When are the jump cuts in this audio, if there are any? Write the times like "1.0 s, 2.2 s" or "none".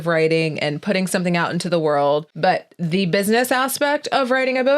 2.3 s